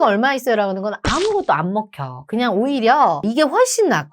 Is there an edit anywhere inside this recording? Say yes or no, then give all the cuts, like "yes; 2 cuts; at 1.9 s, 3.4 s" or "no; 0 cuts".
yes; 1 cut; at 3.2 s